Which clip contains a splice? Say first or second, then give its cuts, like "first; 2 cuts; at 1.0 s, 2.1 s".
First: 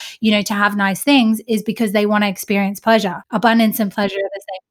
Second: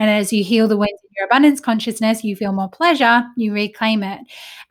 first; 1 cut; at 3.3 s